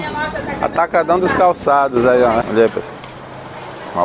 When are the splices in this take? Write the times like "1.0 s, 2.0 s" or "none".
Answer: 2.5 s